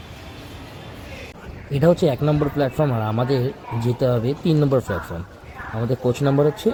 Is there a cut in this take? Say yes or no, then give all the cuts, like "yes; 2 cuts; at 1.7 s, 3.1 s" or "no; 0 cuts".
no; 0 cuts